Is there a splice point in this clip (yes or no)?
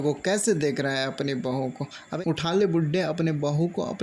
yes